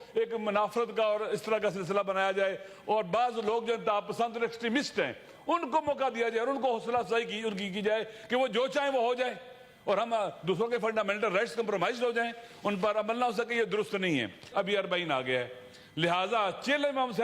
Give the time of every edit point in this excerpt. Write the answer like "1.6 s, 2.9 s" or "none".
14.4 s